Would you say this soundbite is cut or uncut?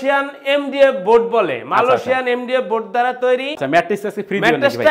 cut